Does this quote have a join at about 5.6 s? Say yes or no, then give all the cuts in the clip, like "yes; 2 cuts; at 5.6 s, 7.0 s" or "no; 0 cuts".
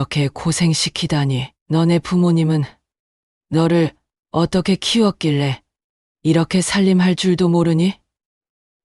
no; 1 cut; at 1.5 s